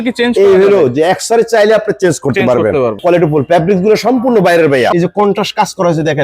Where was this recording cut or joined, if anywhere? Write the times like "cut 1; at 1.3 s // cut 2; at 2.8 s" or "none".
cut 1; at 3.0 s // cut 2; at 4.9 s